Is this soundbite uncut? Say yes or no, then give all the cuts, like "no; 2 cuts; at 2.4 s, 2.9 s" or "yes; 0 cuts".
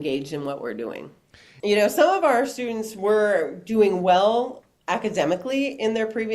no; 1 cut; at 1.5 s